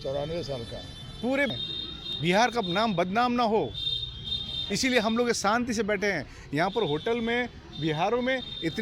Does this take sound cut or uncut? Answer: cut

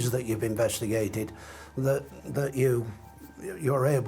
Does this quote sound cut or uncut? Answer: uncut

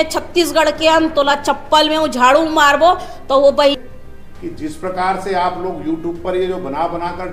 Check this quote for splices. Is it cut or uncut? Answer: cut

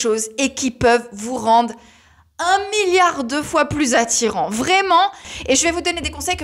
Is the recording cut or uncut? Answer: cut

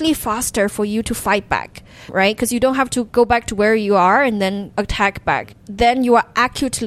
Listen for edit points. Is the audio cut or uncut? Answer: cut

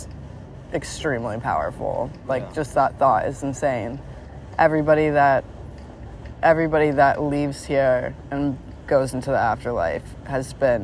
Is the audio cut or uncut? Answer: cut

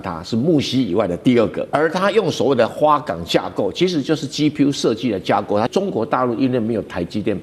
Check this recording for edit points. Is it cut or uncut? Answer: cut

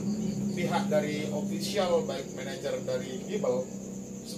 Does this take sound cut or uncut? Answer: uncut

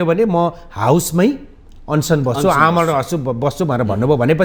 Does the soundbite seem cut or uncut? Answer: uncut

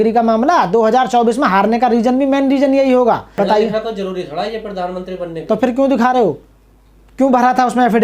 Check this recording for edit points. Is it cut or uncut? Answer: uncut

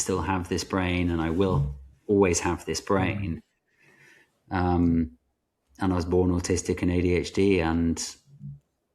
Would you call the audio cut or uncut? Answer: uncut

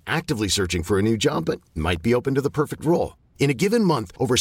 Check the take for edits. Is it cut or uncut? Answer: uncut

